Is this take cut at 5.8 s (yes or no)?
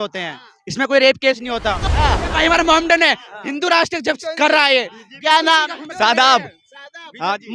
no